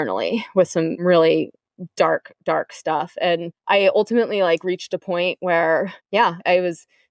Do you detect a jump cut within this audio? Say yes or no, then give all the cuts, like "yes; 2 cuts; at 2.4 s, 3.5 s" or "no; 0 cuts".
yes; 2 cuts; at 1.0 s, 3.5 s